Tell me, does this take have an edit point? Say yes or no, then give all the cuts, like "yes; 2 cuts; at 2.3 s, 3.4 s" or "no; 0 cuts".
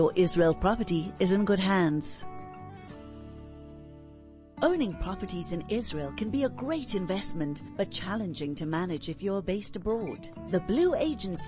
no; 0 cuts